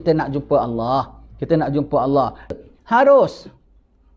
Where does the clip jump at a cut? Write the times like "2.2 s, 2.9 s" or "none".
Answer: 2.5 s